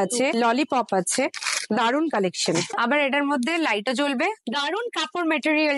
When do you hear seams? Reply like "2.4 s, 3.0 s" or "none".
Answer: 2.7 s, 4.4 s